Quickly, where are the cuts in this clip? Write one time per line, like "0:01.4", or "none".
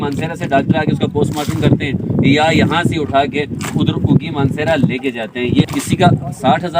0:05.6